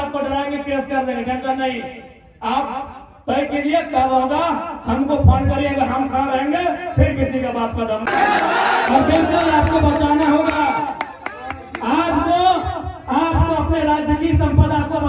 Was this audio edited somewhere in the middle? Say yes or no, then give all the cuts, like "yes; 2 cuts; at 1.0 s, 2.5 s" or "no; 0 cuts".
no; 0 cuts